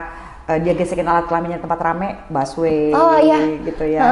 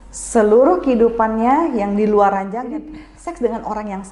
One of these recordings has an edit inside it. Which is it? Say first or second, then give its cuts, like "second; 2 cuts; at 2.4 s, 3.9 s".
second; 1 cut; at 2.6 s